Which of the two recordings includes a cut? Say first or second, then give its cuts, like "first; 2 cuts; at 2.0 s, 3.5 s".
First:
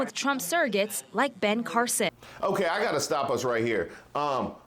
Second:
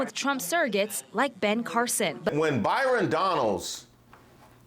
second; 1 cut; at 2.3 s